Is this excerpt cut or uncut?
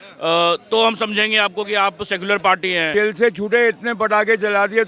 cut